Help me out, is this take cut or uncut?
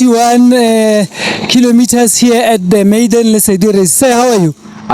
uncut